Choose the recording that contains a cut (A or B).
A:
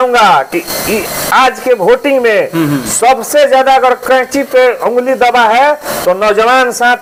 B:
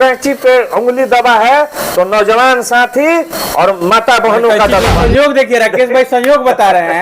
B